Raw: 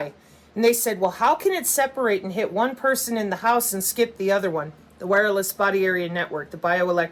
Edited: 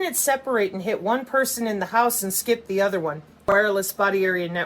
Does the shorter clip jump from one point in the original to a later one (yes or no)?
yes